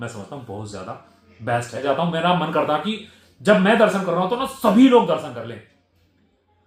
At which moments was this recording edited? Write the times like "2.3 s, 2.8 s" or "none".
1.8 s